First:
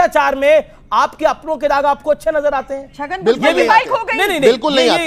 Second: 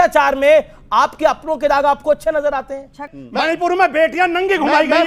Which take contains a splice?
second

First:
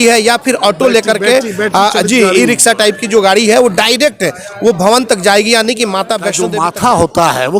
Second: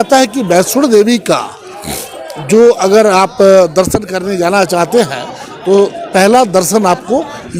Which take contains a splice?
first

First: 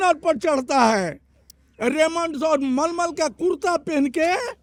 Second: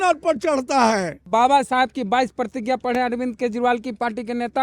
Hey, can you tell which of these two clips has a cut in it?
second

